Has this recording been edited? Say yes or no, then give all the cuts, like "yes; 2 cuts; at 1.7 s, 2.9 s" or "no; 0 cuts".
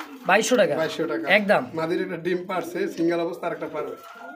no; 0 cuts